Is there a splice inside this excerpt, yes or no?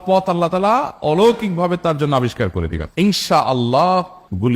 yes